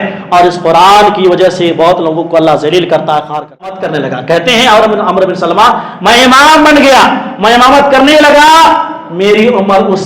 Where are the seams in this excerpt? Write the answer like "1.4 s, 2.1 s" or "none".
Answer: 3.8 s